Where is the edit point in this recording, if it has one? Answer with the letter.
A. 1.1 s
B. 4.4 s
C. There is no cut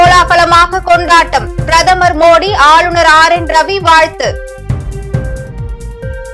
B